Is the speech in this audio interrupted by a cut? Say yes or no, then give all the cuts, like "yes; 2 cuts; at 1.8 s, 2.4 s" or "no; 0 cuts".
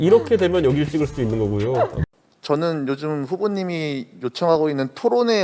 yes; 1 cut; at 2.0 s